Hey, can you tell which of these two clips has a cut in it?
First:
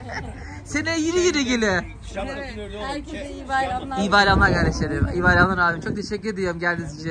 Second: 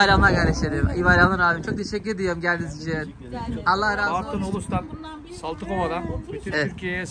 second; 1 cut; at 4.0 s

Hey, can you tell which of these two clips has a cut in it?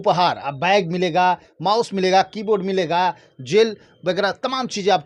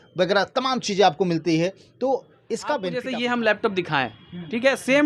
second; 1 cut; at 2.9 s

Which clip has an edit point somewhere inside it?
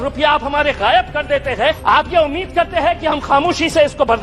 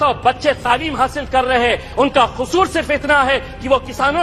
first; 1 cut; at 1.8 s

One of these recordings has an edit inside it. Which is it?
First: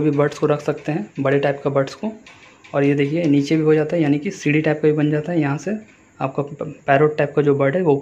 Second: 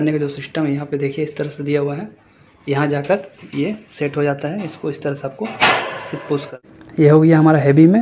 second; 1 cut; at 6.5 s

